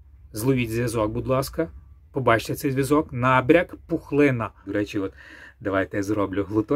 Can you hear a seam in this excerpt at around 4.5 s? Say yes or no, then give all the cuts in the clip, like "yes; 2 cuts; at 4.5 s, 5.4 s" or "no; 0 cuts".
yes; 1 cut; at 4.5 s